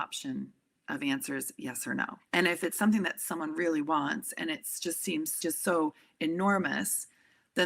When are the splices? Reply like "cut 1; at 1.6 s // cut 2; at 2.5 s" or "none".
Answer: cut 1; at 2.2 s // cut 2; at 5.4 s